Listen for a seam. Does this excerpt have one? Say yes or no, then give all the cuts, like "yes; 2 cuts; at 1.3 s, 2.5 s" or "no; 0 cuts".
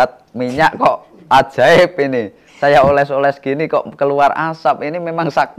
no; 0 cuts